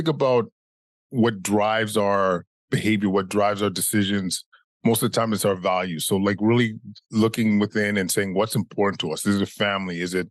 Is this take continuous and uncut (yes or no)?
no